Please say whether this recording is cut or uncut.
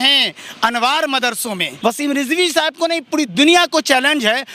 cut